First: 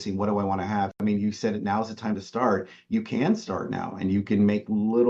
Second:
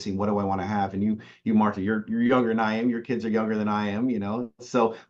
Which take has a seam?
first; 1 cut; at 0.9 s

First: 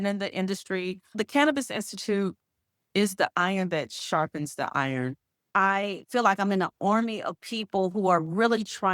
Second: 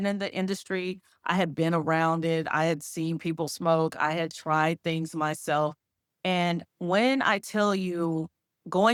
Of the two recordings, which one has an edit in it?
first; 2 cuts; at 1.2 s, 5.5 s

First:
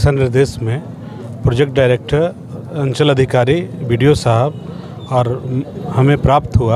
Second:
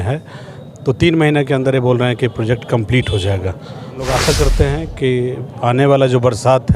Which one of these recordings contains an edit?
second; 1 cut; at 4.1 s

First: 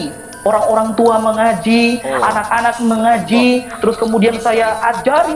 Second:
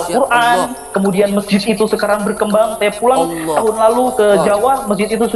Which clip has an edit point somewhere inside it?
first; 1 cut; at 3.7 s

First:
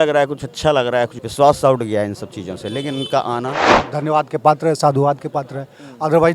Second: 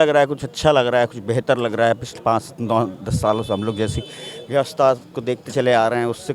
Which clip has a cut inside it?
first; 2 cuts; at 1.2 s, 3.7 s

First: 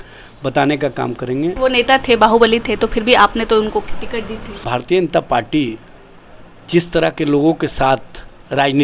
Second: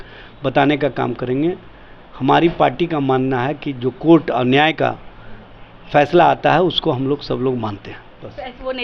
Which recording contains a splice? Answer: first; 2 cuts; at 1.5 s, 4.6 s

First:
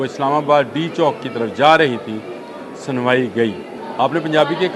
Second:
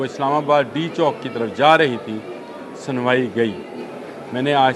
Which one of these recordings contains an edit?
first; 1 cut; at 3.7 s

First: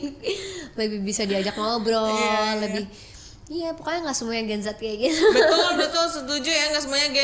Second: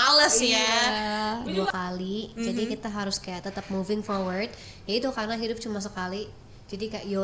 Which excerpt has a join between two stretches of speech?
second; 1 cut; at 1.4 s

